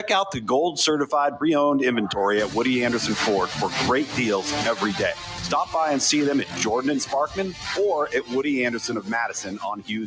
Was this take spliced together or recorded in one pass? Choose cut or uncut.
cut